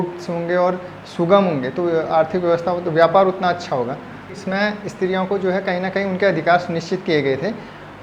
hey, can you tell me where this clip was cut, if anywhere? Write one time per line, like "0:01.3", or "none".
0:04.4